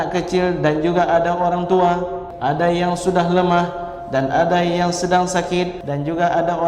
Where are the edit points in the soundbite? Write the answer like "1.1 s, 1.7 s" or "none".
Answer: 2.3 s, 5.8 s